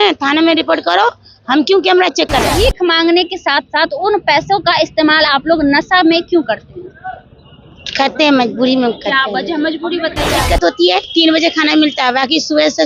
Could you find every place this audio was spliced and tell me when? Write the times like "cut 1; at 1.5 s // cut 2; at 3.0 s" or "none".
cut 1; at 2.5 s // cut 2; at 10.4 s